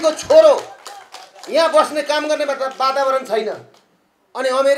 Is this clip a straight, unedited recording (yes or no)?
yes